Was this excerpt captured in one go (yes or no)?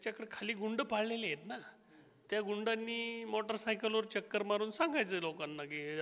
yes